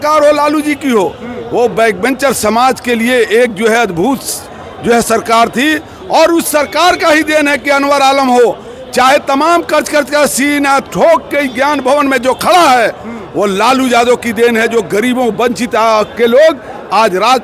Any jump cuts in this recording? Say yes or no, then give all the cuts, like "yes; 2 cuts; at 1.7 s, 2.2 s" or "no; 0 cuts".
no; 0 cuts